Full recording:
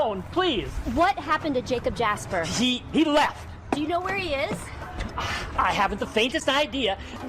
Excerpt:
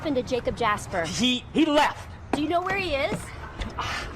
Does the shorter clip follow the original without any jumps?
yes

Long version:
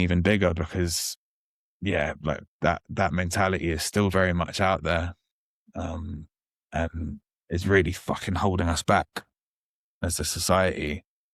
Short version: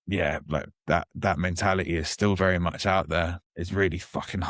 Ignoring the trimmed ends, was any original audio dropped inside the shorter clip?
yes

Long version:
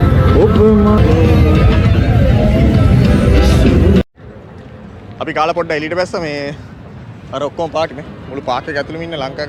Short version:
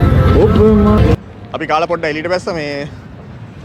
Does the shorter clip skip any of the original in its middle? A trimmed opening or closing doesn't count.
yes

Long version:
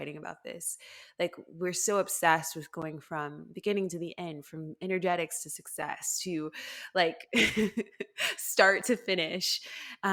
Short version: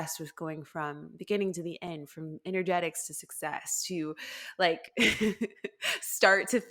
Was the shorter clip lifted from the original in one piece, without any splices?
yes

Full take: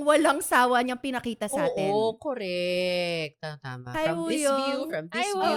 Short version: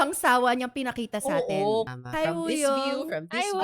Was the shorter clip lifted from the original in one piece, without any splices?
no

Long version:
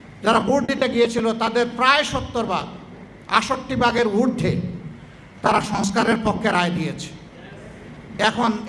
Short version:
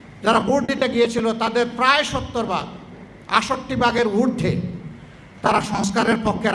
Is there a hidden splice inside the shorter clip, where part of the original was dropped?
no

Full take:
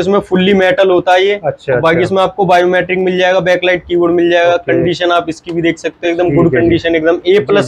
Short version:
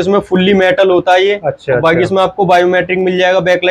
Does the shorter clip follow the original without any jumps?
yes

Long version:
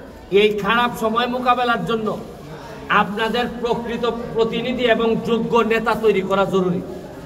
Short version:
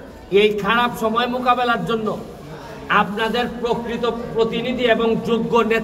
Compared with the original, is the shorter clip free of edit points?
yes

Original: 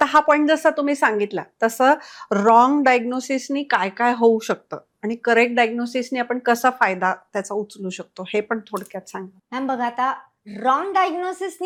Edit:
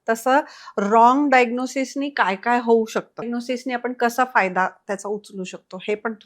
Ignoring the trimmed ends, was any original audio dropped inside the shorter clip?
yes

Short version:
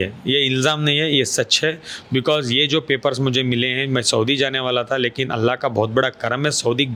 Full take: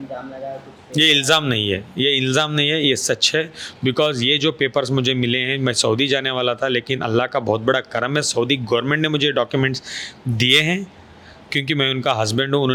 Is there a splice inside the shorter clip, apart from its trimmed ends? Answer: no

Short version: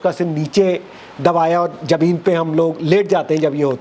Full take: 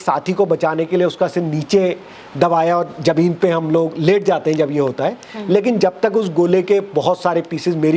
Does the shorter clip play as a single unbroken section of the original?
yes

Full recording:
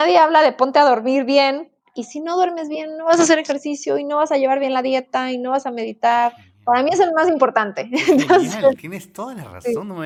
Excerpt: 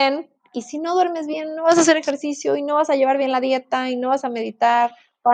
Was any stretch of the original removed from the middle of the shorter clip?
no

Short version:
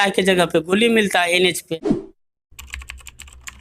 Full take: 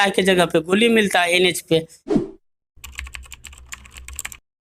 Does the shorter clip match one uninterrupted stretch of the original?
no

